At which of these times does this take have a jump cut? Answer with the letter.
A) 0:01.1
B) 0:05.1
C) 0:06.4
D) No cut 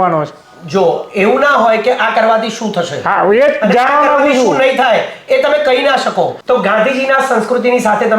C